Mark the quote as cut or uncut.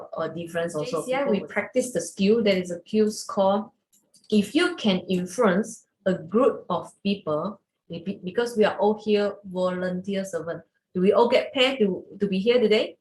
cut